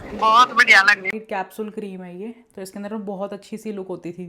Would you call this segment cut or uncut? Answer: cut